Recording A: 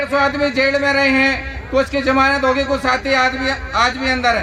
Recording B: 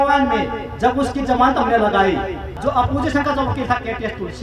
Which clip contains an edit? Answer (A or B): B